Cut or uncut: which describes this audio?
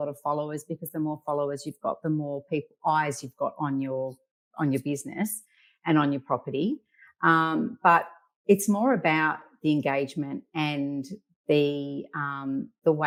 uncut